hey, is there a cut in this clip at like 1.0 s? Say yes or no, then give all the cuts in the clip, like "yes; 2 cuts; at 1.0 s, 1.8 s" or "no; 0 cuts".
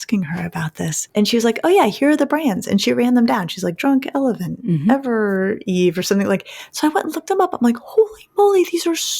yes; 1 cut; at 1.0 s